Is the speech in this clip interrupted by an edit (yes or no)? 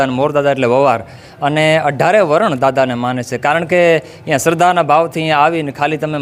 no